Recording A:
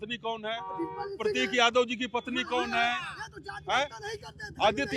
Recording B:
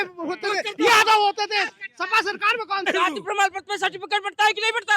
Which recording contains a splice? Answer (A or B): B